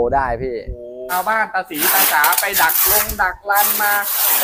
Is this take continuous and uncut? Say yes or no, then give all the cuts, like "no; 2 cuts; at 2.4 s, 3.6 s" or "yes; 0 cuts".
no; 1 cut; at 1.0 s